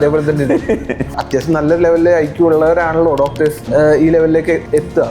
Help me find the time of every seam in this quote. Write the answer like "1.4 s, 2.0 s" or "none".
1.2 s, 3.6 s